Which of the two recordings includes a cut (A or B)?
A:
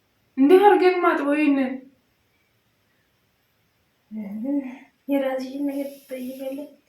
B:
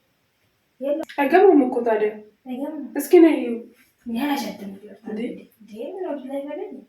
B